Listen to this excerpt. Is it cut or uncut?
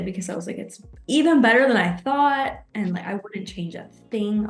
uncut